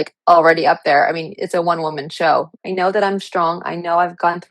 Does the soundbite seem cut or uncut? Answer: cut